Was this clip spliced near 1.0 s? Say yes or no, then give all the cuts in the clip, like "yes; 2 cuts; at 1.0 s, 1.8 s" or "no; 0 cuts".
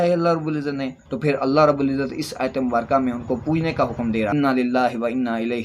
yes; 2 cuts; at 1.0 s, 4.3 s